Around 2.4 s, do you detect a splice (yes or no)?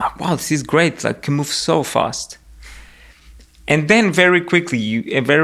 no